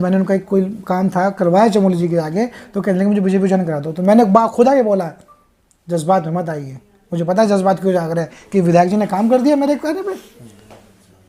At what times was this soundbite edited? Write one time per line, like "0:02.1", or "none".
none